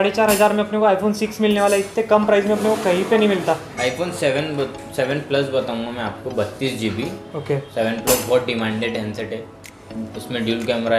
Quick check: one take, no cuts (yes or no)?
yes